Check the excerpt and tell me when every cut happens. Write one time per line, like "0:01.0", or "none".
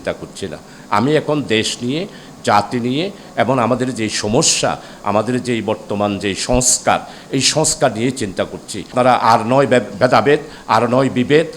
0:08.9